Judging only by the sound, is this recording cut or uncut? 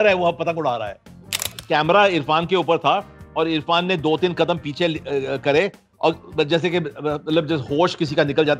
cut